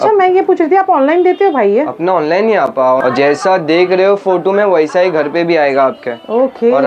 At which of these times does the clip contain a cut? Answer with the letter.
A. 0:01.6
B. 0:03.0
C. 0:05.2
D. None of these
B